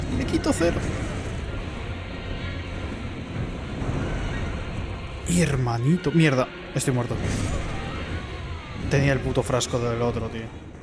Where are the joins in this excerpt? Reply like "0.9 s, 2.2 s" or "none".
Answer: none